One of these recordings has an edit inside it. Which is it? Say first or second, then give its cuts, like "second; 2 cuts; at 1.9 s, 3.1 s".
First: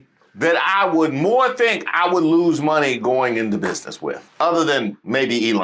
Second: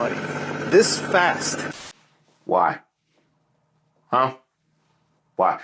first; 1 cut; at 4.2 s